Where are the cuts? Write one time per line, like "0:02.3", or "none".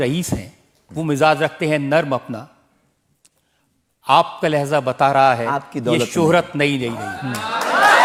none